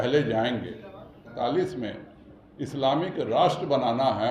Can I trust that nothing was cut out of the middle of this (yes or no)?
no